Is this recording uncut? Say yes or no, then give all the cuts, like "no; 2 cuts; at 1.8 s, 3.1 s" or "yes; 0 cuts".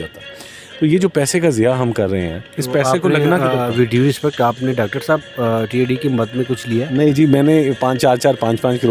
yes; 0 cuts